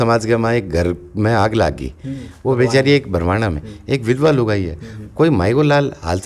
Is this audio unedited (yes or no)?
yes